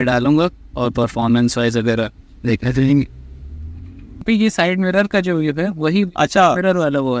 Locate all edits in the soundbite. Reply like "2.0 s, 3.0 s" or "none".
4.2 s